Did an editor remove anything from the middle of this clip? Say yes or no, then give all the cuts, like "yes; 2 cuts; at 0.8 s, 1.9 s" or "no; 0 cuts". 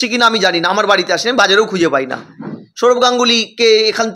no; 0 cuts